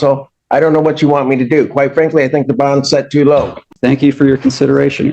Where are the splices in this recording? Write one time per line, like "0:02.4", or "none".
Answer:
0:03.7